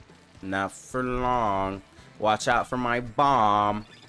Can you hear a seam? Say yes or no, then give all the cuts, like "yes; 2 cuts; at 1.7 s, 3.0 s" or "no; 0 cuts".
no; 0 cuts